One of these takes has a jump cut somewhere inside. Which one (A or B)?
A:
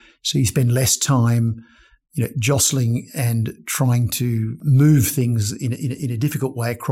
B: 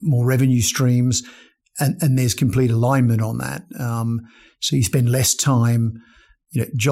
A